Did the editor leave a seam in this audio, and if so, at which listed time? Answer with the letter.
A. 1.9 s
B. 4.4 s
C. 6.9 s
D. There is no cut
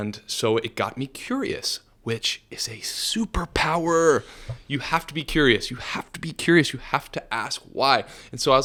D